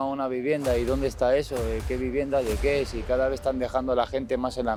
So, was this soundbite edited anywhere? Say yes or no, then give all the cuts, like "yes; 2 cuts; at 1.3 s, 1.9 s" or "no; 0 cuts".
no; 0 cuts